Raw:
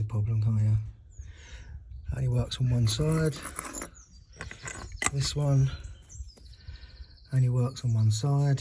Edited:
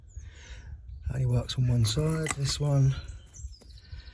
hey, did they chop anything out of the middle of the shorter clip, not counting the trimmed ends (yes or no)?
yes